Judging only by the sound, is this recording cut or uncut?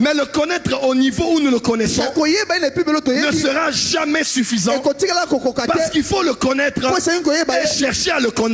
uncut